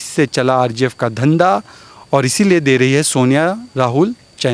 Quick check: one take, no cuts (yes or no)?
yes